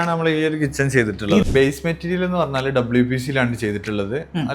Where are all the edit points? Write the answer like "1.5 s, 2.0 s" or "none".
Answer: 1.4 s